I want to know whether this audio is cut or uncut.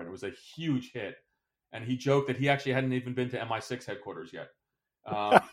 uncut